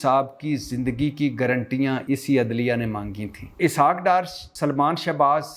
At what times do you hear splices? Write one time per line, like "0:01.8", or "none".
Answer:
0:02.0
0:03.6
0:04.5